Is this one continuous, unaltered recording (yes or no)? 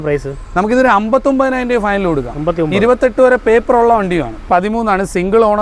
no